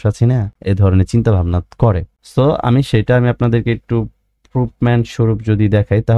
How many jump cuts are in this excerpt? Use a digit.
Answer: 0